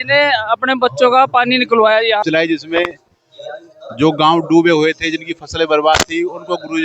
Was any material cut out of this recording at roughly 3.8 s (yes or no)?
no